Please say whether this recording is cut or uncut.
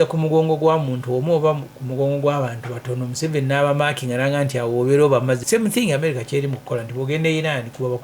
cut